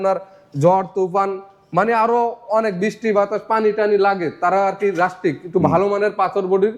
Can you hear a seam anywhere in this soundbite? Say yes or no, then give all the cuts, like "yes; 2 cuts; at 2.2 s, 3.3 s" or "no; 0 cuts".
no; 0 cuts